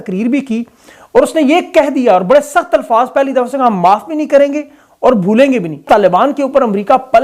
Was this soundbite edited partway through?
yes; 1 cut; at 5.8 s

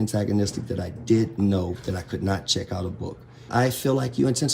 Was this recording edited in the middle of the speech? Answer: yes; 1 cut; at 3.5 s

